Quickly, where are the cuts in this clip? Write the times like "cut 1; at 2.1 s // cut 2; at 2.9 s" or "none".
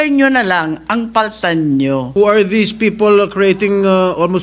cut 1; at 2.1 s